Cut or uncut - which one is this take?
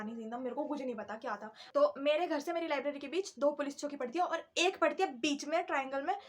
cut